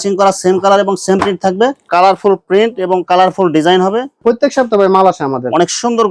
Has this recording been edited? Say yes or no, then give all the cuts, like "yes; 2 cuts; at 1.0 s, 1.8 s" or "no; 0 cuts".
yes; 2 cuts; at 1.9 s, 4.2 s